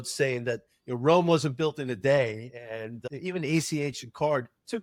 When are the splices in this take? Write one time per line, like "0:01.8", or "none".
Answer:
none